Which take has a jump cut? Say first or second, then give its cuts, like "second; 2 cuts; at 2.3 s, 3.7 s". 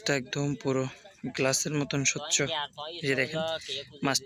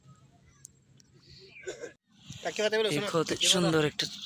second; 1 cut; at 2.1 s